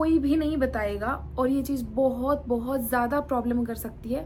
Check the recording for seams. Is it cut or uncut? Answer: uncut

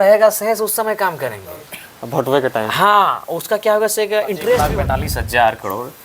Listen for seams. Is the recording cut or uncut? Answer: cut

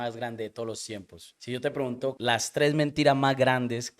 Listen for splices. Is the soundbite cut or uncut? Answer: cut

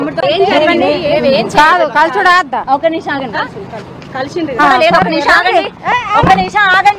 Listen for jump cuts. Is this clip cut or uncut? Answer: cut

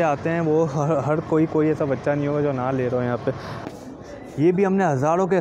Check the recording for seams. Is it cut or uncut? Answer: cut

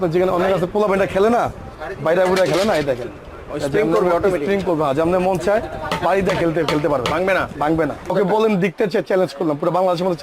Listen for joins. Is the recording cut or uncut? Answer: cut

